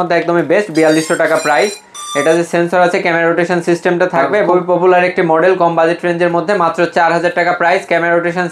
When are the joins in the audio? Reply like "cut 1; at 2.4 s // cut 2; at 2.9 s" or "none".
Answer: cut 1; at 4.5 s